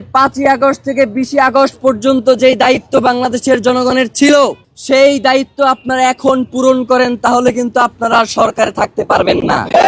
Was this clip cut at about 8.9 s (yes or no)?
no